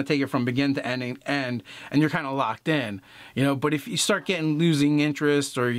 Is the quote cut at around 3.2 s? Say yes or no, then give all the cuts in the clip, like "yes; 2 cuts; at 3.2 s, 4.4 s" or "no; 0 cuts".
no; 0 cuts